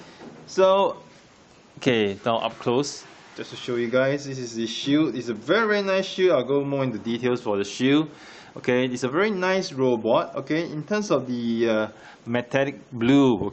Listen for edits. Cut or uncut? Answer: uncut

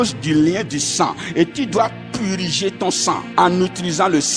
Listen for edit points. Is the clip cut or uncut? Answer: cut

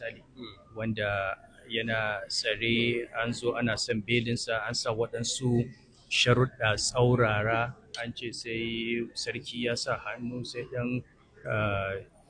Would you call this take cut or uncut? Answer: uncut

